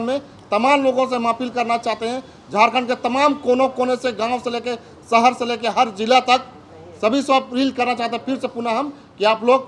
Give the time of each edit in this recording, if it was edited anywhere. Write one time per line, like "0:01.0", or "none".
none